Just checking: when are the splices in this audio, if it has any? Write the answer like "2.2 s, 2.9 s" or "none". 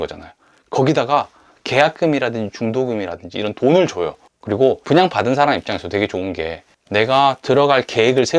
4.4 s

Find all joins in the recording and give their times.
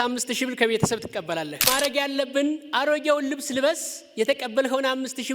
1.6 s

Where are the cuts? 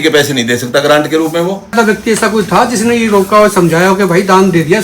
1.7 s

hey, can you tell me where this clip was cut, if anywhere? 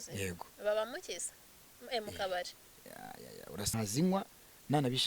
3.7 s

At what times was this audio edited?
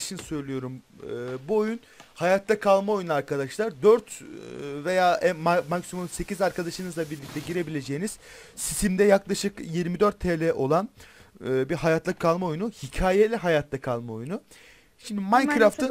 none

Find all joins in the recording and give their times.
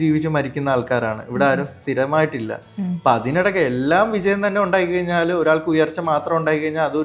none

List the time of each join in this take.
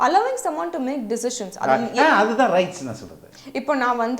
3.3 s

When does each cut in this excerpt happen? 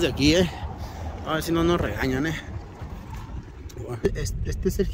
4.0 s

